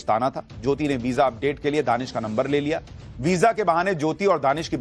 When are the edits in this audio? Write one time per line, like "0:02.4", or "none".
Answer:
none